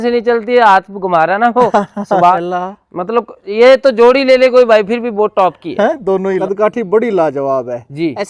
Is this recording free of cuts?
no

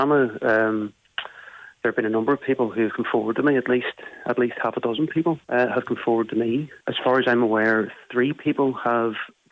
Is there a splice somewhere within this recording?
yes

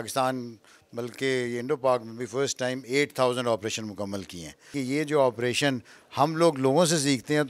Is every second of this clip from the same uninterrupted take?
no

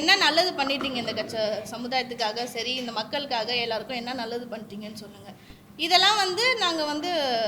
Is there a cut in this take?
no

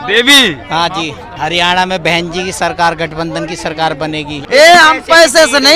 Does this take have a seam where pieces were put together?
yes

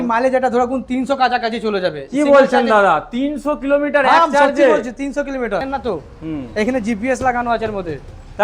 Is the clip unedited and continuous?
no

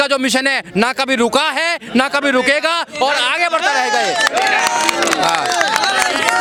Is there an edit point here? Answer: no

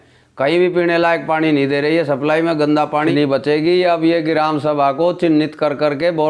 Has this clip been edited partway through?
yes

